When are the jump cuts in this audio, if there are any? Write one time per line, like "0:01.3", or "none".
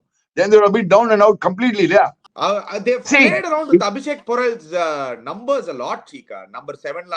0:02.2